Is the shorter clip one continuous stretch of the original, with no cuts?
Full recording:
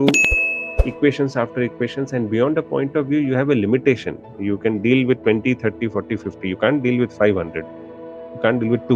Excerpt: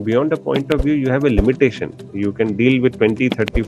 yes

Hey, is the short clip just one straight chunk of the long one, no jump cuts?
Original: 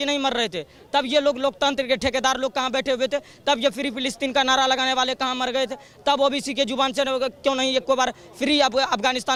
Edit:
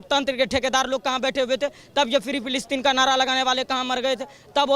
yes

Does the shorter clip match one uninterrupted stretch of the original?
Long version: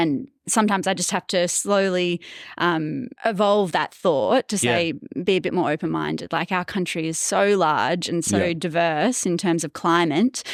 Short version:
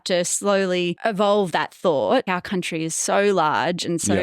no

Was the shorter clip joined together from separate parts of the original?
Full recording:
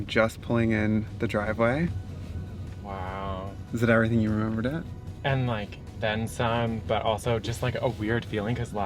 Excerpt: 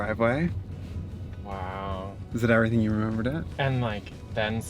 yes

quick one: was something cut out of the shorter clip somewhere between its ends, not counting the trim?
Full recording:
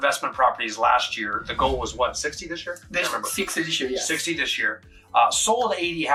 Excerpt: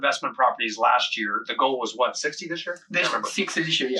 no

